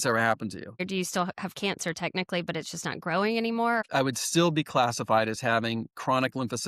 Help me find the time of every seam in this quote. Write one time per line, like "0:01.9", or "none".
0:00.8
0:03.8